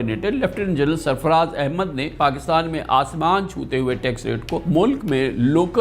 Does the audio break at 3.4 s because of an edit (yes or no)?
no